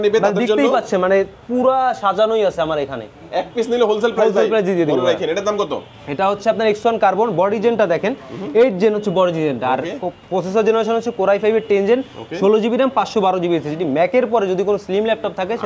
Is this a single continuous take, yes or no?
yes